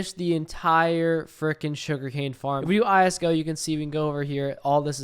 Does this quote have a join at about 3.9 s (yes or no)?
no